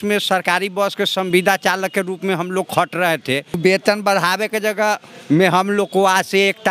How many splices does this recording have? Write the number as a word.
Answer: one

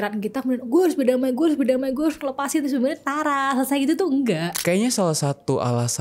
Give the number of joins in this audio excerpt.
one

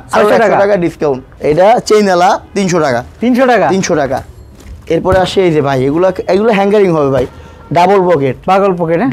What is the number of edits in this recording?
one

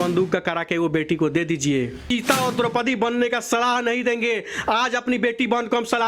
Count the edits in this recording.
one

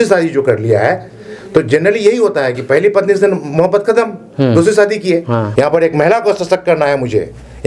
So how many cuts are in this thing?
one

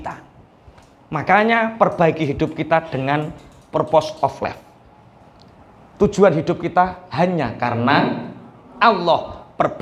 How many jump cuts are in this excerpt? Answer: zero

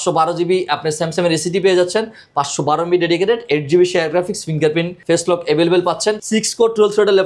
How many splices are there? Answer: two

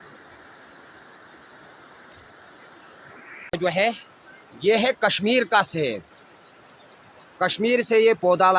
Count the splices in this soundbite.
one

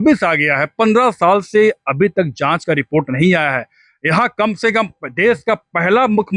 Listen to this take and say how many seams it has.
zero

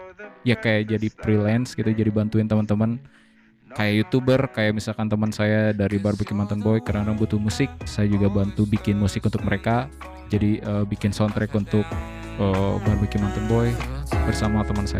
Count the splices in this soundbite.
zero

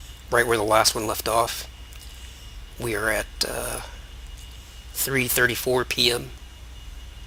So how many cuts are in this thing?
zero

